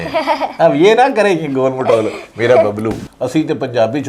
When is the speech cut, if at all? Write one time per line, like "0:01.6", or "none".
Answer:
0:03.1

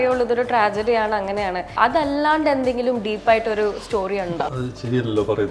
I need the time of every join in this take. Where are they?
0:01.8
0:04.3

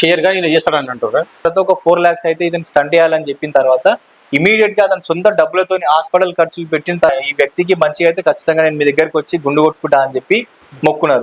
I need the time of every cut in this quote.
0:01.4
0:07.1

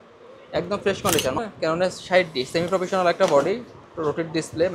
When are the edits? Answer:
0:01.4

